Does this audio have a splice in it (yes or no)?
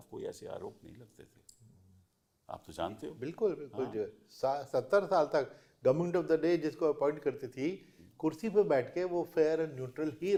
no